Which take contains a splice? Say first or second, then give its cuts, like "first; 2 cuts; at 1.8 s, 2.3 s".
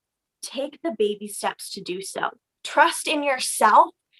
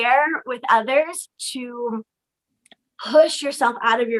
first; 1 cut; at 2.5 s